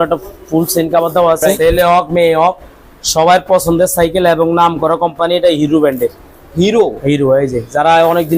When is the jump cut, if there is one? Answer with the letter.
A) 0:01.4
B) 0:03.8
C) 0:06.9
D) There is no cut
A